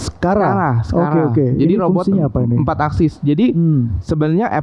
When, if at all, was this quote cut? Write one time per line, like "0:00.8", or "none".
none